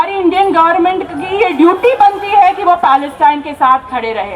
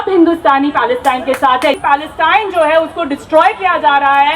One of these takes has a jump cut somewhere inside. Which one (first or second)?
second